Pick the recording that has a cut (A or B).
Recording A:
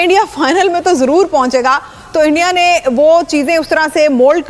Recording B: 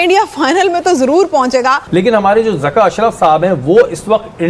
B